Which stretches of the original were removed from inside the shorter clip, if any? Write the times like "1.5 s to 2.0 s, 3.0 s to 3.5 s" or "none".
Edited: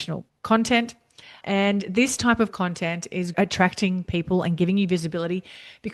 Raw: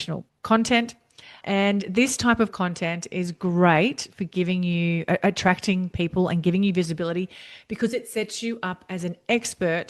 3.3 s to 5.2 s

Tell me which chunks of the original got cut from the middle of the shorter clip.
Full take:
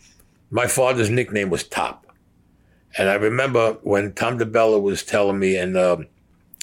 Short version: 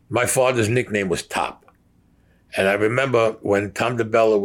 none

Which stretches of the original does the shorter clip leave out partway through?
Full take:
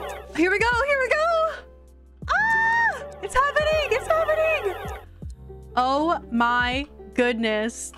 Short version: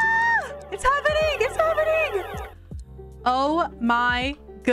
none

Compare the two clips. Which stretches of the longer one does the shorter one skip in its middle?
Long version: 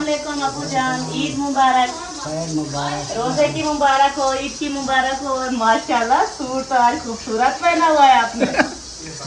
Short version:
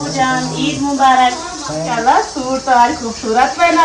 2.4 s to 5.9 s

